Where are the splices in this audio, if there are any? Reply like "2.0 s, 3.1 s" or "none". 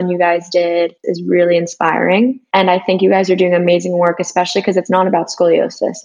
1.1 s